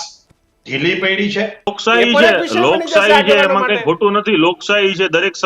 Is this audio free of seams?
no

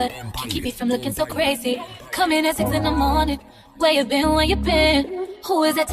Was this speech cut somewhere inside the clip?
yes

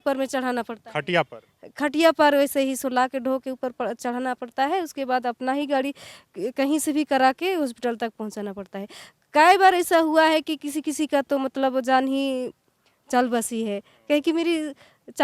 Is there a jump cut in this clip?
no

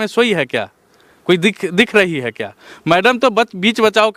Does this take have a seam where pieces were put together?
no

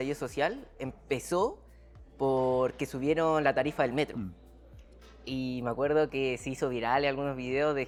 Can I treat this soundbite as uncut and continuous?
yes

